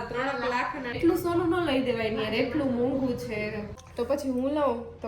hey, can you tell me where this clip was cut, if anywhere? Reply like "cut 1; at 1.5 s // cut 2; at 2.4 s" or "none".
cut 1; at 1.0 s // cut 2; at 3.8 s